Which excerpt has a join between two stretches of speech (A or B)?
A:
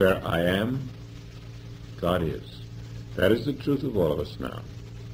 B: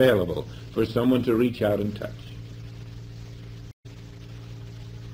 B